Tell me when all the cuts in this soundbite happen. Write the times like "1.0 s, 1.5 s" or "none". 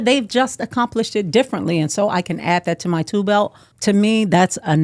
3.6 s